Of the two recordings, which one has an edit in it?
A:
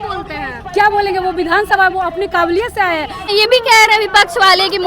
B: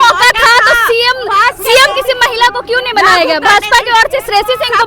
A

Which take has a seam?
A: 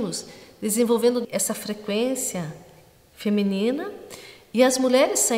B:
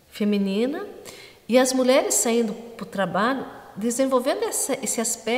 A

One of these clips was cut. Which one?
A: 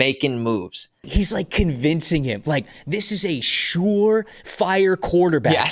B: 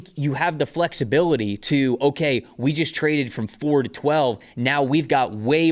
A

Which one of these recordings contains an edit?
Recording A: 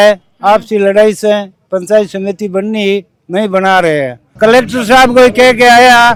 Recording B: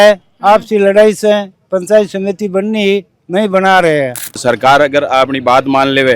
B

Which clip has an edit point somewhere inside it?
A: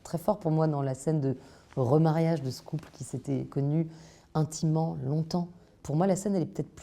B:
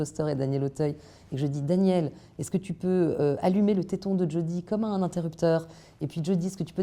A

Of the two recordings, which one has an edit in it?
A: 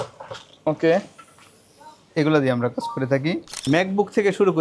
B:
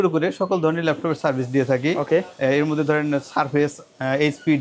A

